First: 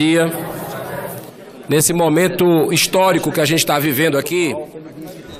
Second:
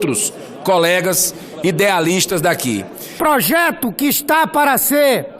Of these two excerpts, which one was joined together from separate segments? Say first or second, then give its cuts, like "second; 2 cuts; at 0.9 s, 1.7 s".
second; 1 cut; at 3.2 s